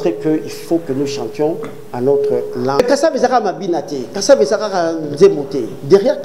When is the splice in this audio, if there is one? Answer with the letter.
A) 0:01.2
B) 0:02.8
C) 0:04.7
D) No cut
B